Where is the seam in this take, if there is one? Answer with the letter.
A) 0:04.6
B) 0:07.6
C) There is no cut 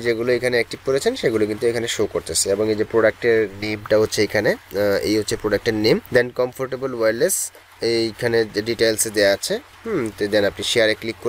A